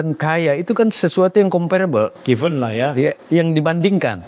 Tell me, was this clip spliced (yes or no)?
no